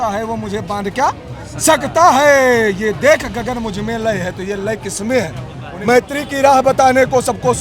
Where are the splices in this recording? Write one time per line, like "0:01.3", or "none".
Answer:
0:05.6